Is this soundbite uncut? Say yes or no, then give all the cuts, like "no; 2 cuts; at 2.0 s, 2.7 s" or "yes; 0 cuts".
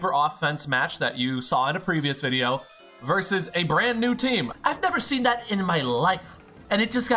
no; 1 cut; at 4.5 s